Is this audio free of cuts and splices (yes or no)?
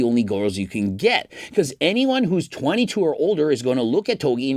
yes